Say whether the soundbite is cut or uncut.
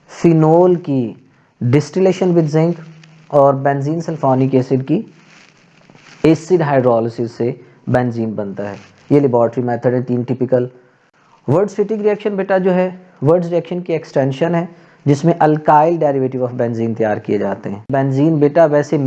cut